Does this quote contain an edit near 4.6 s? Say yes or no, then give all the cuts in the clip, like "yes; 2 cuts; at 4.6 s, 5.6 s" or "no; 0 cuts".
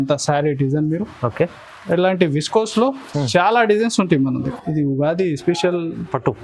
yes; 1 cut; at 4.6 s